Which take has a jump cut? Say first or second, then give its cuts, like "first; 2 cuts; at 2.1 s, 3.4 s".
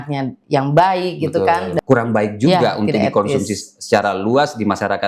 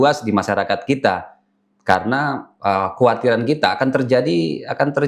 first; 1 cut; at 1.7 s